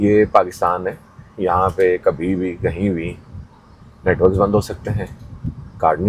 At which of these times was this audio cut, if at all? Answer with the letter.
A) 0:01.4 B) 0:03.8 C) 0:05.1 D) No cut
D